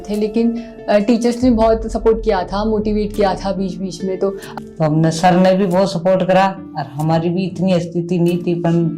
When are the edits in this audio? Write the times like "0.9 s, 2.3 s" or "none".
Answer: 4.4 s

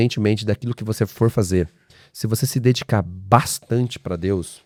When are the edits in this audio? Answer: none

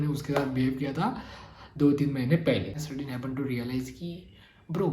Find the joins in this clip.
2.8 s

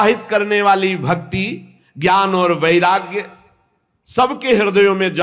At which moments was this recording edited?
none

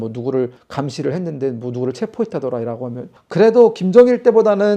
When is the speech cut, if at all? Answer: 3.2 s

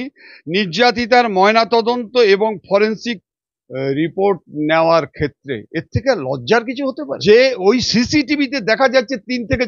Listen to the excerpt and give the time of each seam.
7.1 s

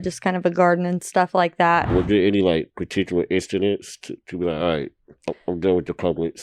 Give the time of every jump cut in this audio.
1.9 s

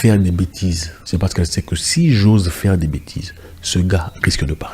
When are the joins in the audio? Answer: 0.9 s

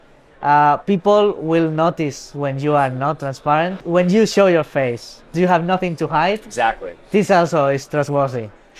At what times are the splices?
3.8 s

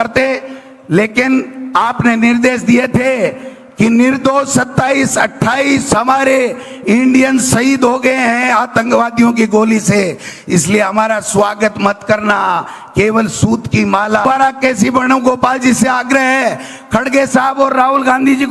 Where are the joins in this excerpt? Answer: 14.2 s

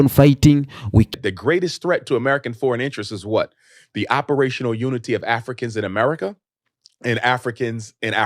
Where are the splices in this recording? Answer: 1.1 s

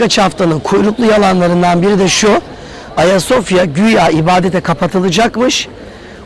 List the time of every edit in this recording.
none

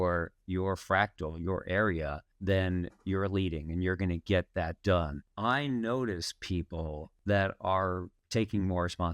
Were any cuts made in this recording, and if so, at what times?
2.3 s, 5.2 s, 7.1 s, 8.1 s

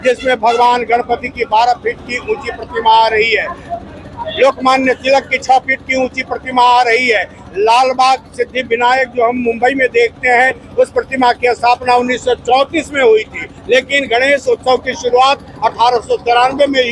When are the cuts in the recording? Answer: none

